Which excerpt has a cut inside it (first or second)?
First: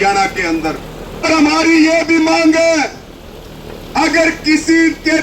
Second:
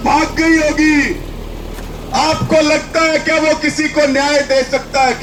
first